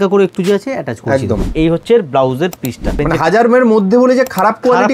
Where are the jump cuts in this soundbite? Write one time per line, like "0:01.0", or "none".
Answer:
0:01.5
0:03.0